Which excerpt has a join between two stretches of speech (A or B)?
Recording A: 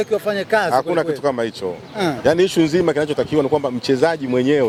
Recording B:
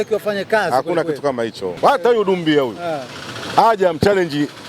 B